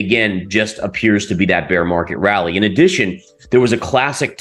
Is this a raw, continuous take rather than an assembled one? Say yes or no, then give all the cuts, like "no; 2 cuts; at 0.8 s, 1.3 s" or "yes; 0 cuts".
yes; 0 cuts